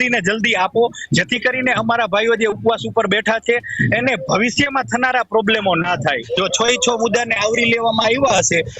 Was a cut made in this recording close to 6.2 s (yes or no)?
yes